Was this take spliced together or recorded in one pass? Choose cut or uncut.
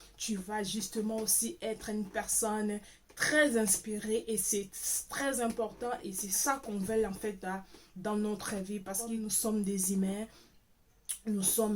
cut